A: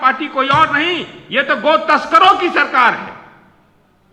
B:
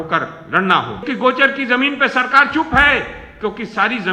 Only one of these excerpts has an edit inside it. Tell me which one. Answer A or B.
B